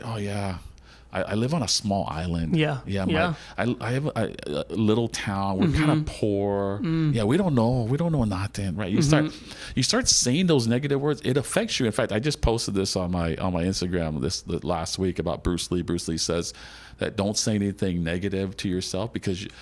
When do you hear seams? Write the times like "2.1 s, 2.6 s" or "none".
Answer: none